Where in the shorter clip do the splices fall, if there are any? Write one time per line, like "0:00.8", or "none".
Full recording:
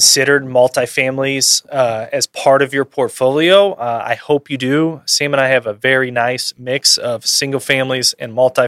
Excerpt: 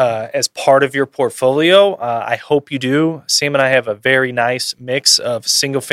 none

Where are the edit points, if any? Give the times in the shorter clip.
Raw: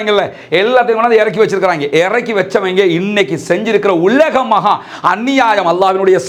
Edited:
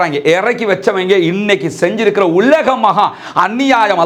none

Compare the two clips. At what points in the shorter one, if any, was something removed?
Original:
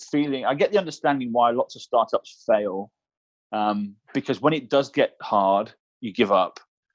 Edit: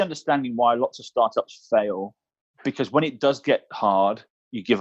0:02.5

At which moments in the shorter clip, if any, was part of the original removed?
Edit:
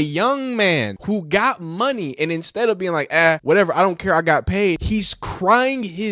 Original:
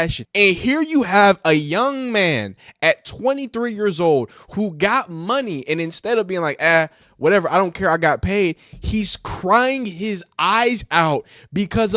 0:00.9
0:03.4
0:04.8

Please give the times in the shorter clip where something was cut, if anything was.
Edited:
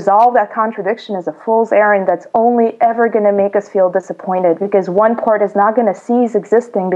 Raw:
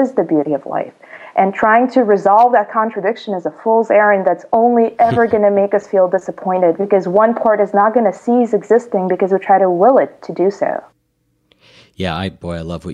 none

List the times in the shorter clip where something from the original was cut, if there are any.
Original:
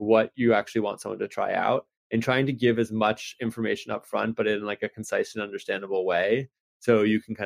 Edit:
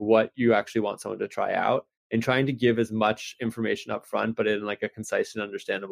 none

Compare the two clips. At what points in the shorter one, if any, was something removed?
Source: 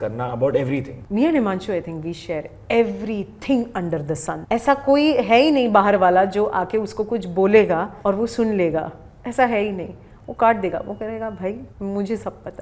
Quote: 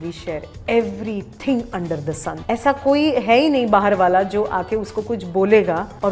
none

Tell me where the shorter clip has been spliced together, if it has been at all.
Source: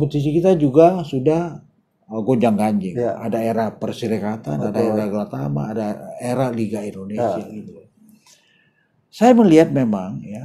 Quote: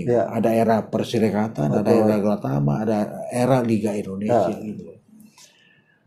none

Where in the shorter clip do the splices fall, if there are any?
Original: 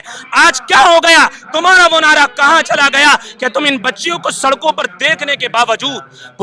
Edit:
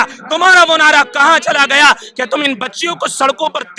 none

